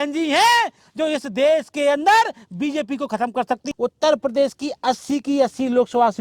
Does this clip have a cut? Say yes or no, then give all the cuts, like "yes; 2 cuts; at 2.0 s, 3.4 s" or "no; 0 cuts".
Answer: yes; 1 cut; at 3.7 s